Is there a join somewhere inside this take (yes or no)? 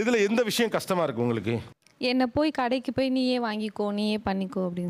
no